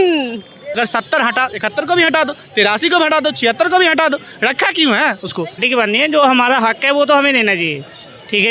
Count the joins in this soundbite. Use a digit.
2